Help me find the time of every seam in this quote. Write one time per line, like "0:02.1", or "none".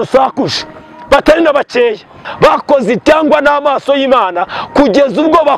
0:02.2